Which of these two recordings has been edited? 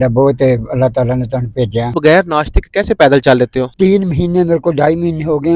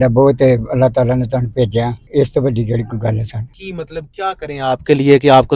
first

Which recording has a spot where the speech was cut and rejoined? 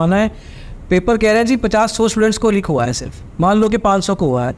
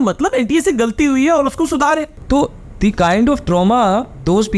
second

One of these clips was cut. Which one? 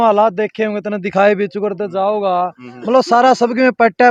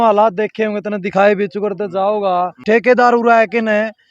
second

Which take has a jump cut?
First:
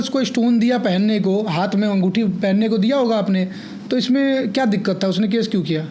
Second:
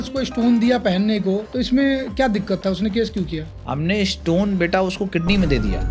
second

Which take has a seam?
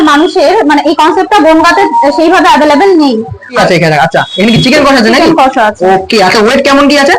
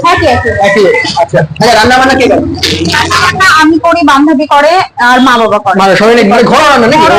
first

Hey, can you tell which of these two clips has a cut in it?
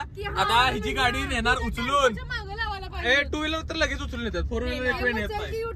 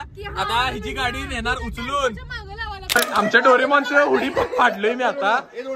second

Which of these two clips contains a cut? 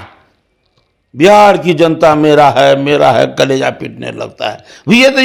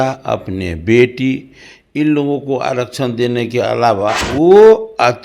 second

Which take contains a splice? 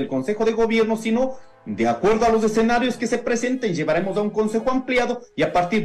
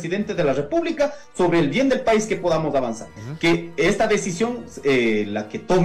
second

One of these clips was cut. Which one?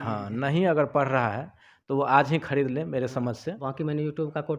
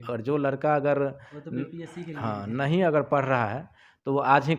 first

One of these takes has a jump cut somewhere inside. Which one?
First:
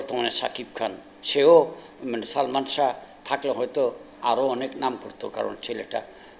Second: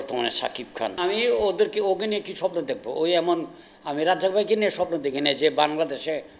second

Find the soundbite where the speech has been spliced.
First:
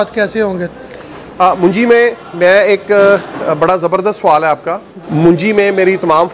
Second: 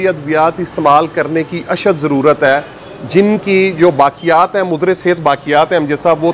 first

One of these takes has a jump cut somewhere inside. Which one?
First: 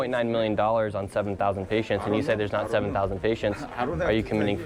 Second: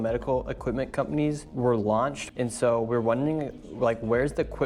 second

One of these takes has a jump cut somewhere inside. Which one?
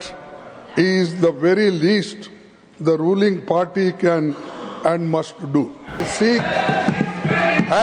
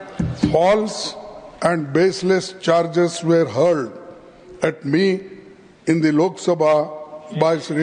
first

